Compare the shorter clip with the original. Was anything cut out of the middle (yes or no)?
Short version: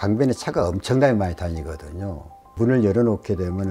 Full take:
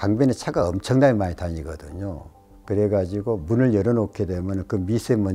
yes